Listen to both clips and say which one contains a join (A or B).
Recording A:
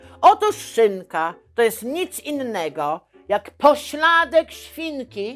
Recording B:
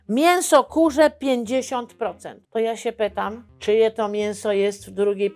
B